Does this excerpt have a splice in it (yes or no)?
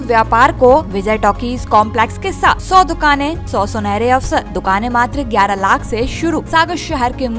yes